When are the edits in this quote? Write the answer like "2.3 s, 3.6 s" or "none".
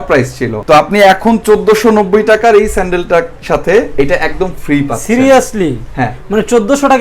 none